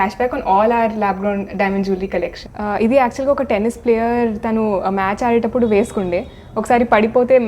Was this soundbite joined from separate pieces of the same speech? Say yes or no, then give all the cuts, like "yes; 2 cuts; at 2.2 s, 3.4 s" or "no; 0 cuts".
yes; 1 cut; at 2.5 s